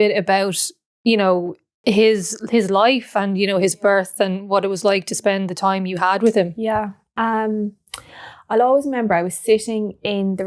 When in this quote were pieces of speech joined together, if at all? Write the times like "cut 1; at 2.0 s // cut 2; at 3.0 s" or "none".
cut 1; at 1.6 s